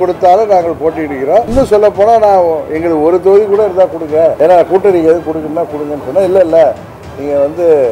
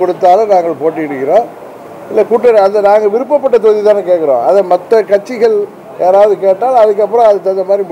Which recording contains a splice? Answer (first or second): first